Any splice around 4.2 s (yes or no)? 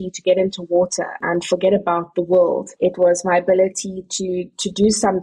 no